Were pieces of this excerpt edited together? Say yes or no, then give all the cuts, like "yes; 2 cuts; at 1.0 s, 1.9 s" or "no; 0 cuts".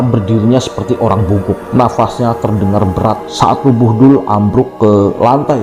yes; 2 cuts; at 1.6 s, 3.3 s